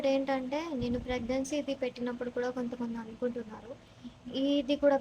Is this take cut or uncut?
uncut